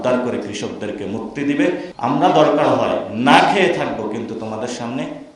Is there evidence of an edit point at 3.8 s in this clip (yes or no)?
no